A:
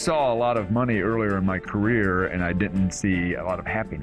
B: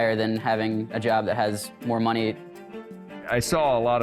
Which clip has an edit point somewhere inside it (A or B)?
B